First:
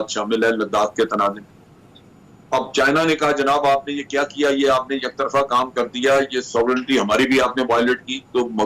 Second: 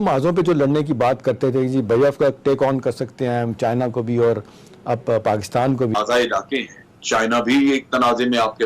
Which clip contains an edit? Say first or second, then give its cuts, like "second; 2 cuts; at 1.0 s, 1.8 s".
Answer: second; 1 cut; at 6.0 s